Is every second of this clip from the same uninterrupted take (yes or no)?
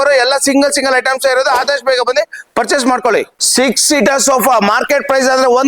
no